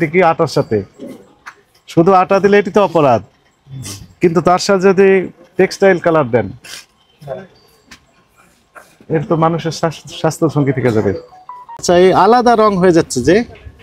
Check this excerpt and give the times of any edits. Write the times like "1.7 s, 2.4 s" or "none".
11.8 s